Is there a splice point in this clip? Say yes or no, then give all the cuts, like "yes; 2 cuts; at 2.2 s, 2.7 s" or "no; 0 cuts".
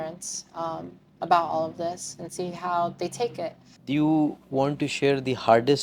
yes; 1 cut; at 3.7 s